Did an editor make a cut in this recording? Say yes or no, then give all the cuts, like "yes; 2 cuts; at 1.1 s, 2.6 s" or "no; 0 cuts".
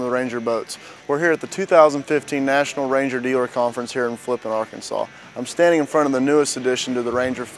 no; 0 cuts